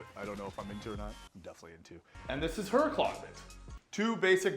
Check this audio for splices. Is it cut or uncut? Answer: cut